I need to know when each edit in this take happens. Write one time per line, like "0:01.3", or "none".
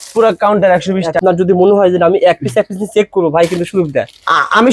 0:01.2